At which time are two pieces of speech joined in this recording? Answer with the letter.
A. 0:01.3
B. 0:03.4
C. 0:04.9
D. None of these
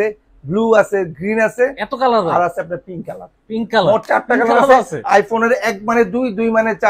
D